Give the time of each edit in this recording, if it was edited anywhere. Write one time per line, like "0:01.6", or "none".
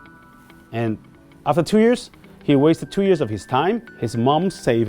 0:03.9